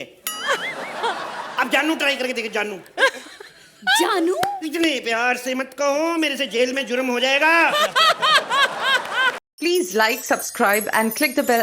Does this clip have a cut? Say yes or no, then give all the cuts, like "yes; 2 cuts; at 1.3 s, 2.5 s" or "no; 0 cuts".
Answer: yes; 1 cut; at 9.4 s